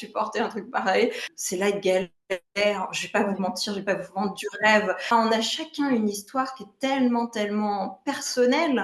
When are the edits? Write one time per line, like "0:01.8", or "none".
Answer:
0:01.3
0:05.1